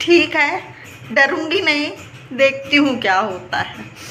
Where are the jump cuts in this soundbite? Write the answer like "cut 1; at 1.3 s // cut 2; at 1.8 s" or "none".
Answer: none